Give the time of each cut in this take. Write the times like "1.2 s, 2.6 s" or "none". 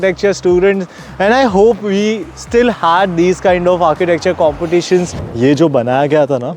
5.2 s